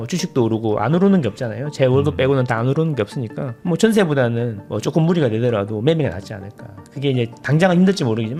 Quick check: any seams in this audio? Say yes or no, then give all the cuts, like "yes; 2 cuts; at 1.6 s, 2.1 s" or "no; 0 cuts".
no; 0 cuts